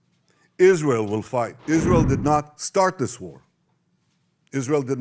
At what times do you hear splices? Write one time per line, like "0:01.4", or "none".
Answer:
0:01.6